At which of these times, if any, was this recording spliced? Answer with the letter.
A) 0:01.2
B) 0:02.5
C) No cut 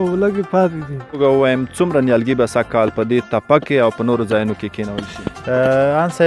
A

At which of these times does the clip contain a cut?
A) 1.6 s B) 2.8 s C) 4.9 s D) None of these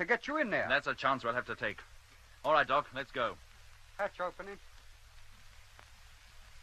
C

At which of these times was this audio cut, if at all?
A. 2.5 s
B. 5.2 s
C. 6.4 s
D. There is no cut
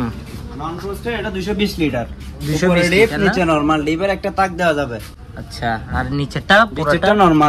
D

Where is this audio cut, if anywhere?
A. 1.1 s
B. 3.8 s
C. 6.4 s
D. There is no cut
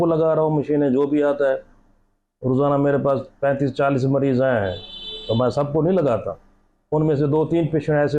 D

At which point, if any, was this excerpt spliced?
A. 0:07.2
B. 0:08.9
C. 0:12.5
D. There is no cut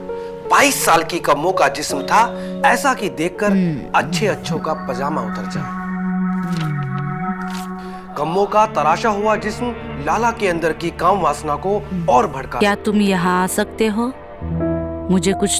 C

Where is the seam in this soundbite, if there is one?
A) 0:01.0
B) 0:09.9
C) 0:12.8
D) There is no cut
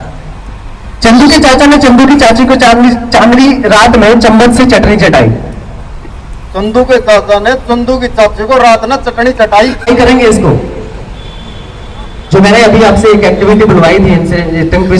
B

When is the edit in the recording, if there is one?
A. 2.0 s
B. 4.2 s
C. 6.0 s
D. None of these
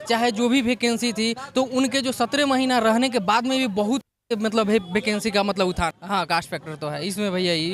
C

